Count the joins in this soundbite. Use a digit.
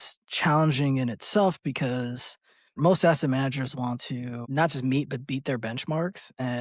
2